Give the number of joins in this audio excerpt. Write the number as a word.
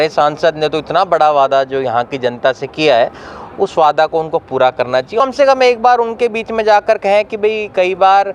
one